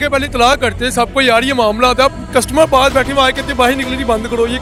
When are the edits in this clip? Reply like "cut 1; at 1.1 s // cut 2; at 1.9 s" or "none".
none